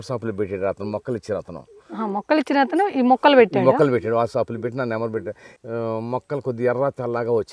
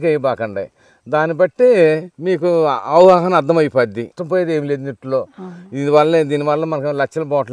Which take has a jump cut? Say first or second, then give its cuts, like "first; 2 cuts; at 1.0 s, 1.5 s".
first; 1 cut; at 5.5 s